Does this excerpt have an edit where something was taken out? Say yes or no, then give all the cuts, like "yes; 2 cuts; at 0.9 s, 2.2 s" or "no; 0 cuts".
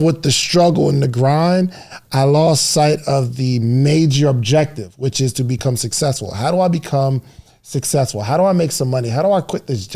no; 0 cuts